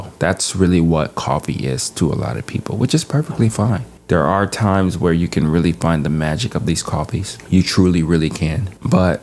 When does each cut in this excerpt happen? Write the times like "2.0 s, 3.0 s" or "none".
none